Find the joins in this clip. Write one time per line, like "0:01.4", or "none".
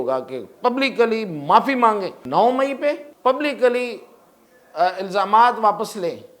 0:02.2
0:03.1